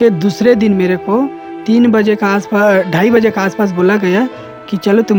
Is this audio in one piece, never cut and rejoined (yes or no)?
yes